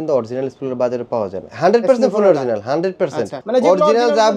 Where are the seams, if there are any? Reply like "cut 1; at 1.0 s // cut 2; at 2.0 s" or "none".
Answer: cut 1; at 1.4 s // cut 2; at 3.4 s